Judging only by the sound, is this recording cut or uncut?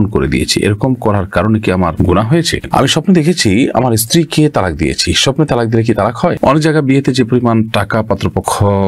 cut